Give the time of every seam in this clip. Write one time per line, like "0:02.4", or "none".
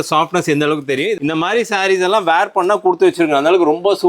0:01.1